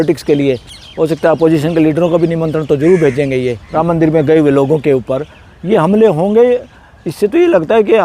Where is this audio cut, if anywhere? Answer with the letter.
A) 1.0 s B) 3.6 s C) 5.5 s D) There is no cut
B